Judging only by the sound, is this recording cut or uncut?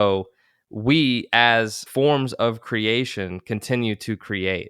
cut